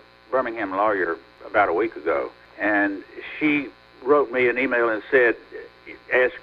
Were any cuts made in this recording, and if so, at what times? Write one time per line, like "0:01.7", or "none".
0:01.3
0:02.4
0:03.8